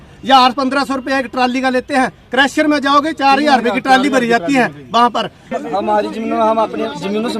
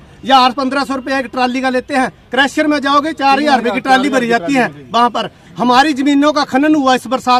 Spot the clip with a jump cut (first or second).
first